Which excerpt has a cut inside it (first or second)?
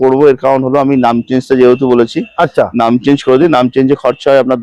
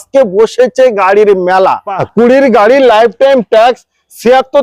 second